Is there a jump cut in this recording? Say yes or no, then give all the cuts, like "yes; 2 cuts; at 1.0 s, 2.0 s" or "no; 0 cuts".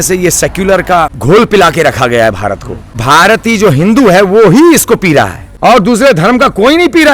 yes; 3 cuts; at 1.2 s, 2.9 s, 5.4 s